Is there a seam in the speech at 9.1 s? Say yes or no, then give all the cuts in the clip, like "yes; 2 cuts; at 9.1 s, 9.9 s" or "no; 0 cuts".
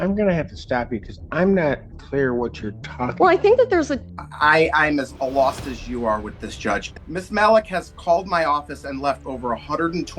no; 2 cuts; at 4.0 s, 6.9 s